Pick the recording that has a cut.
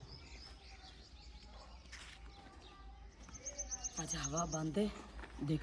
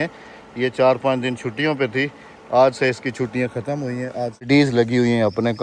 second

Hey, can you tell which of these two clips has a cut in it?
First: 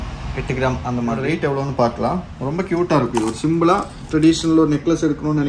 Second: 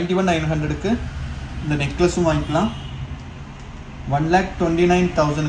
first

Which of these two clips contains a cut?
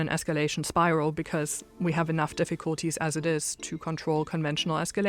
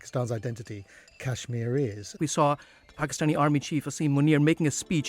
second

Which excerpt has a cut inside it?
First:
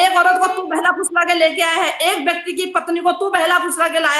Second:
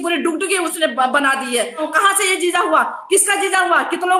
second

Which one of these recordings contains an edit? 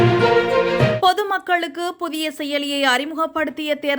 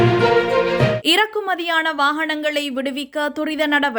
first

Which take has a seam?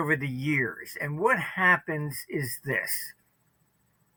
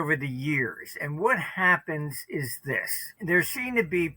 second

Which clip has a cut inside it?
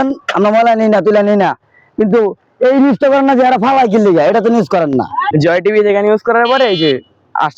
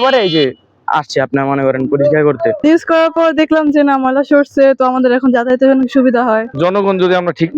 second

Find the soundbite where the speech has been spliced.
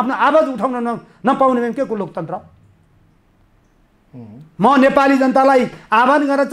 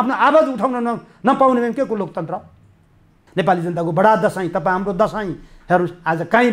second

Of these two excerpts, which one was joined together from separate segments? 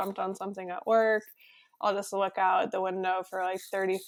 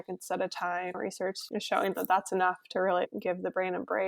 second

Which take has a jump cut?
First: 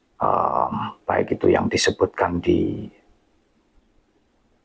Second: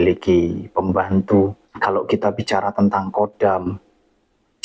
second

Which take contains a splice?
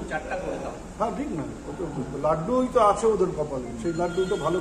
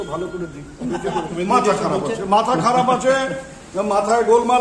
second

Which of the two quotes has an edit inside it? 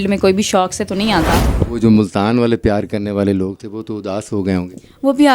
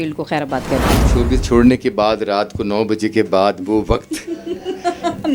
first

